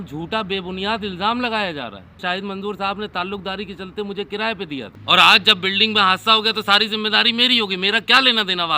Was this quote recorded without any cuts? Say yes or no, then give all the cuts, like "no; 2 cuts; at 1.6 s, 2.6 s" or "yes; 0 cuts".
no; 2 cuts; at 2.2 s, 4.9 s